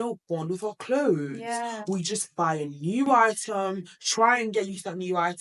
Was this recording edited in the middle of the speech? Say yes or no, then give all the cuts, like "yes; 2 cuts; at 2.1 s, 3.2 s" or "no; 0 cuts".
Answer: no; 0 cuts